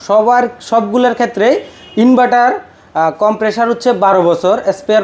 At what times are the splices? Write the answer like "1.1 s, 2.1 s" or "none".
none